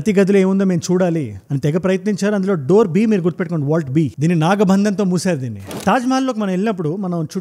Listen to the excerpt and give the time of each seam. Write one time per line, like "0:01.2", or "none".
0:04.1
0:05.7